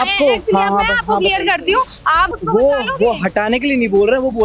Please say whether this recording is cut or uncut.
cut